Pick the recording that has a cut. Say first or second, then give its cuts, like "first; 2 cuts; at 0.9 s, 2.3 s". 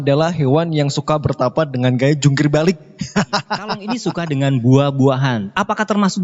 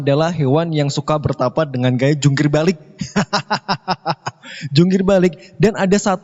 first; 1 cut; at 3.9 s